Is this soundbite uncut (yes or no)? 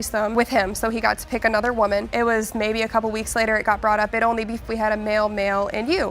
no